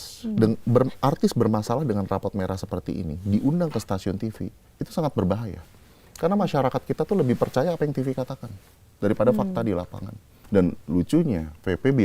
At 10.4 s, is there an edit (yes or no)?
yes